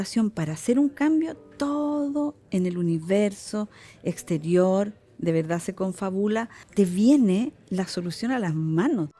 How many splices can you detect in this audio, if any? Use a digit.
1